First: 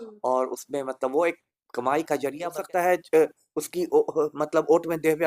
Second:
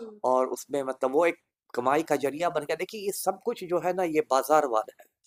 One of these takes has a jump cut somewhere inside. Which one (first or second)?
first